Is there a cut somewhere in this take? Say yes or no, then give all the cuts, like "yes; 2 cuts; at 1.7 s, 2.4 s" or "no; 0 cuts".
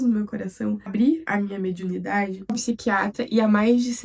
yes; 2 cuts; at 1.2 s, 2.6 s